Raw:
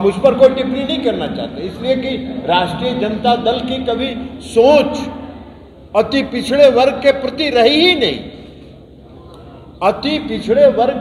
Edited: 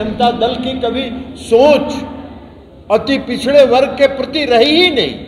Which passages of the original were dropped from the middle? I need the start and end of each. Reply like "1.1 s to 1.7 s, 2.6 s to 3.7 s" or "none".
none